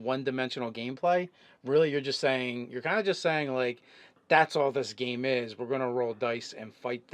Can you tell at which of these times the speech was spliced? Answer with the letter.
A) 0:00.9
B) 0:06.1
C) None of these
A